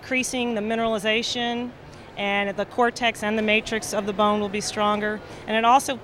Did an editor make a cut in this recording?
yes; 1 cut; at 1.6 s

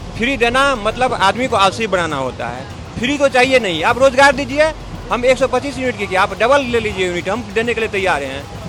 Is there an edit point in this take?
no; 0 cuts

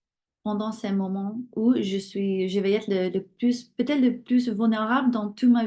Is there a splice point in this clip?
no; 0 cuts

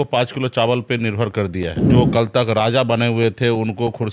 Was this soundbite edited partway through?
yes; 1 cut; at 1.8 s

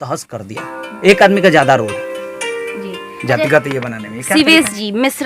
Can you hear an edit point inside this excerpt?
no; 0 cuts

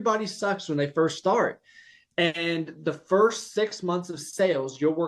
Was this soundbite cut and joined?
no; 0 cuts

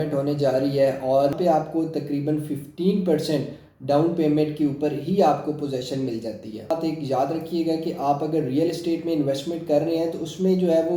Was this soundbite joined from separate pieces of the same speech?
yes; 2 cuts; at 1.3 s, 6.7 s

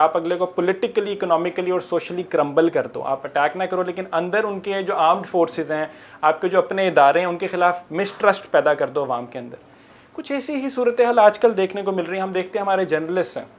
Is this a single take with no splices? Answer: yes; 0 cuts

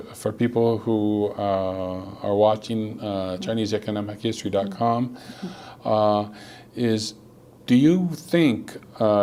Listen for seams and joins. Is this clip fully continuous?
yes; 0 cuts

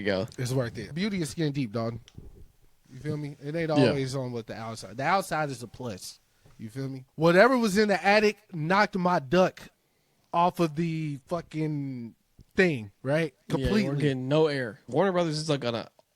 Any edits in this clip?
yes; 3 cuts; at 0.9 s, 7.0 s, 14.9 s

